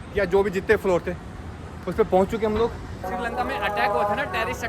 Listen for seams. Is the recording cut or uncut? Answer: cut